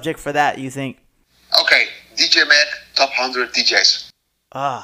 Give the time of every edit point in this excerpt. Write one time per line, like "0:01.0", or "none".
none